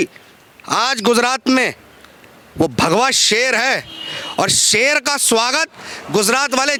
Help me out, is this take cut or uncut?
uncut